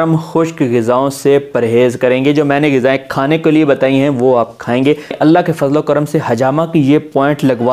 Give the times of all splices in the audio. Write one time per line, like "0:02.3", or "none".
0:05.1